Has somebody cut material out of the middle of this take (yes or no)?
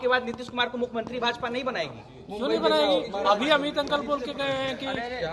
no